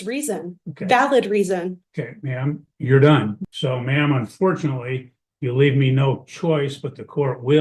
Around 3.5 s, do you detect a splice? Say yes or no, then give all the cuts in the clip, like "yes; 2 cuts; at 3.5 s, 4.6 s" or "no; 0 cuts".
yes; 1 cut; at 3.5 s